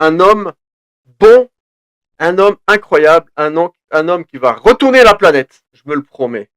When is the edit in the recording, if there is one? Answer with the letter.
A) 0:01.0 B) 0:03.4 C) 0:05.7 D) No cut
C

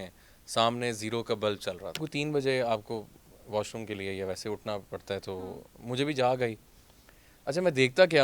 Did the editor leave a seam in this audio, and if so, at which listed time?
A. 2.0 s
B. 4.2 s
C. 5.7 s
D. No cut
A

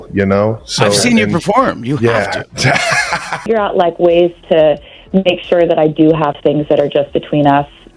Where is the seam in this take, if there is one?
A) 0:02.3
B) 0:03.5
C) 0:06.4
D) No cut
B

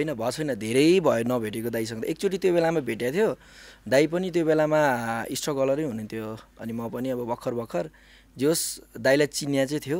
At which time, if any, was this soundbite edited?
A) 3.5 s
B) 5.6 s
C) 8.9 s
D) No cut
D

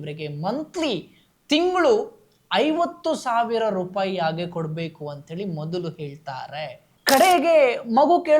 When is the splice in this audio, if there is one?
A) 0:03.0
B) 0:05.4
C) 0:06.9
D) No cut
C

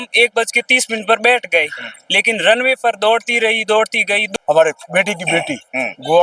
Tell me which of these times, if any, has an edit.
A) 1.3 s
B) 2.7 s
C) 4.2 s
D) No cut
C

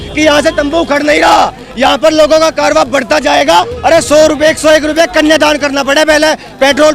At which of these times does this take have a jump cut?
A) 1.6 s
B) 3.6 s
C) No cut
B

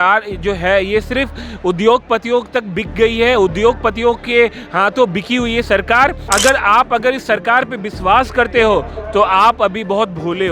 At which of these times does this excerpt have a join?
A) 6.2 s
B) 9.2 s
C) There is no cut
A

